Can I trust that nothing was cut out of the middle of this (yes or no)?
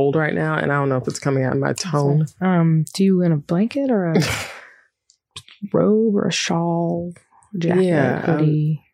no